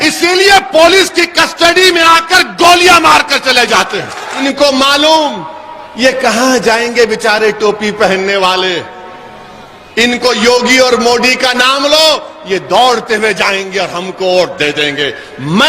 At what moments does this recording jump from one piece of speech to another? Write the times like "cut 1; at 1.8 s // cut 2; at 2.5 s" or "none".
cut 1; at 4.4 s